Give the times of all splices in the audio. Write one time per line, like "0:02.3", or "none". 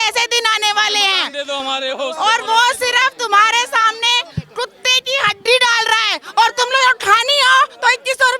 none